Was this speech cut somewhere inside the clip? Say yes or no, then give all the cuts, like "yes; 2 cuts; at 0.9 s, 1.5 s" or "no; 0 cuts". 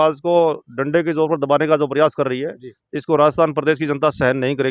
no; 0 cuts